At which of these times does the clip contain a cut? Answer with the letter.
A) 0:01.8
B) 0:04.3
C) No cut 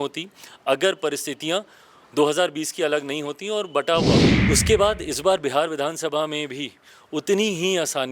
B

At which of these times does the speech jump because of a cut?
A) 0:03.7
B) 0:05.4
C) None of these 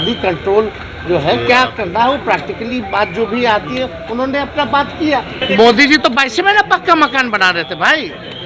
B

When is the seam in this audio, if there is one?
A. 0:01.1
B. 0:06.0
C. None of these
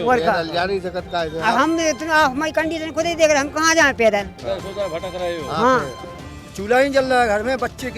B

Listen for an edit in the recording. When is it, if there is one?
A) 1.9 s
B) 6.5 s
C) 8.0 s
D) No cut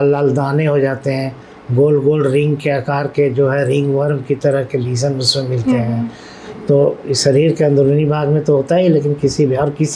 D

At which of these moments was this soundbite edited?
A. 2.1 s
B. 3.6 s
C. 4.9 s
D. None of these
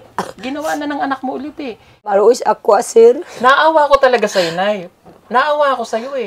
A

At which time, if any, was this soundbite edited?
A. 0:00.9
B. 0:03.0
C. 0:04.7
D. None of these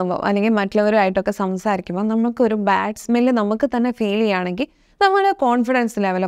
D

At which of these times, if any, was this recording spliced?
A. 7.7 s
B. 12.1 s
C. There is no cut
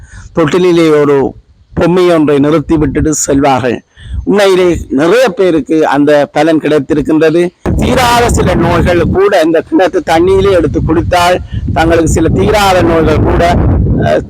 A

